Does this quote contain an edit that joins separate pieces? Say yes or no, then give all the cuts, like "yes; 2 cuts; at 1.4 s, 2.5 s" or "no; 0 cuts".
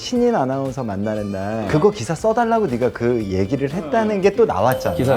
yes; 1 cut; at 1.6 s